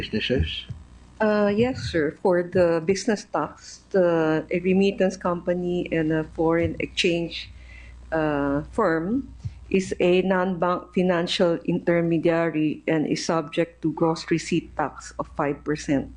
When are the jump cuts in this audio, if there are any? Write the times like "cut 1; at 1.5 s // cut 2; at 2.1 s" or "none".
cut 1; at 5.2 s